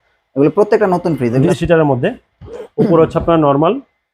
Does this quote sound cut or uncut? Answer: cut